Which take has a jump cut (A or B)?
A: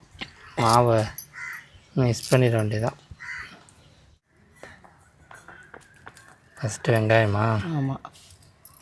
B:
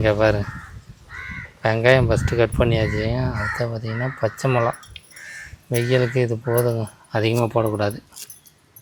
A